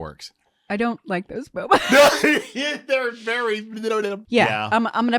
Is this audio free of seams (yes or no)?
no